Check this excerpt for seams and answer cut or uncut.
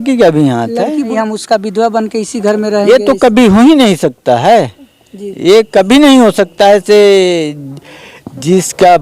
cut